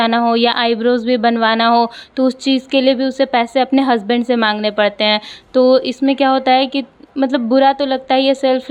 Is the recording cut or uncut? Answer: uncut